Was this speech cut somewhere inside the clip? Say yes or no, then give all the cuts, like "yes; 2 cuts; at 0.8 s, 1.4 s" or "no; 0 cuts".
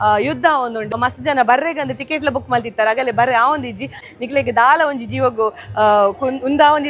yes; 2 cuts; at 1.0 s, 4.0 s